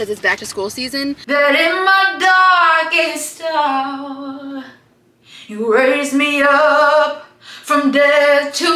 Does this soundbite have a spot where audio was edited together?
yes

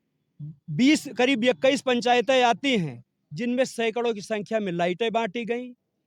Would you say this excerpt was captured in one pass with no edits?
yes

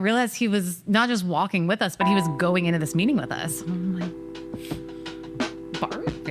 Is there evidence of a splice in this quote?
no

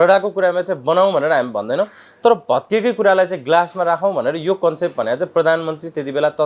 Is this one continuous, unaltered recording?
yes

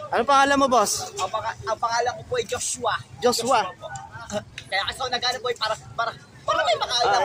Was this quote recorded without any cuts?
yes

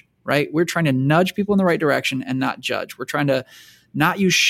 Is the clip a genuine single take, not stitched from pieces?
yes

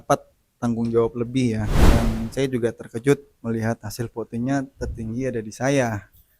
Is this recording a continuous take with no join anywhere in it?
no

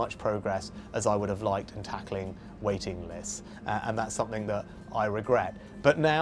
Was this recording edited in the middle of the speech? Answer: no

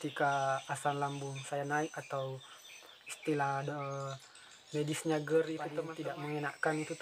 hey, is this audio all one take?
no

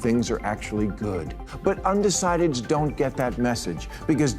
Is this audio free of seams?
no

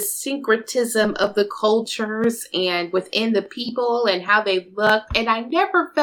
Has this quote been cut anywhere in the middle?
no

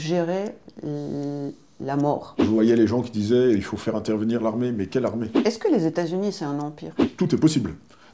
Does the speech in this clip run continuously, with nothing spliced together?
no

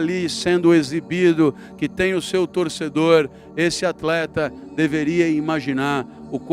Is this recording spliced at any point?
no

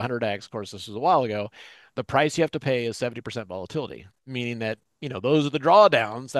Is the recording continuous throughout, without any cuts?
yes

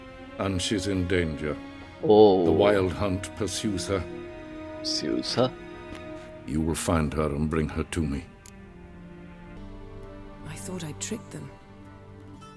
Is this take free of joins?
no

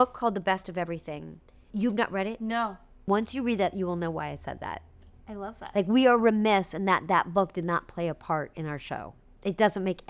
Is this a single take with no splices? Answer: no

